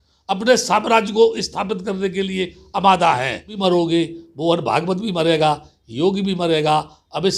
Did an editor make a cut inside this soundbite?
yes; 1 cut; at 3.5 s

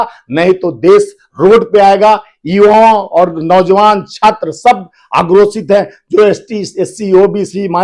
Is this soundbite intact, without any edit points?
yes; 0 cuts

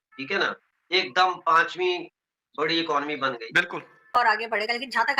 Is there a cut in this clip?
yes; 1 cut; at 4.1 s

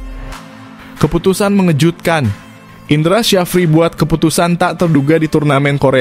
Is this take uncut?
no; 1 cut; at 1.0 s

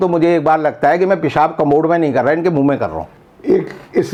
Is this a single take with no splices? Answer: yes; 0 cuts

